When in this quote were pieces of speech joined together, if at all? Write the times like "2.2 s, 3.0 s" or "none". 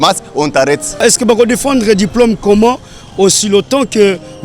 1.0 s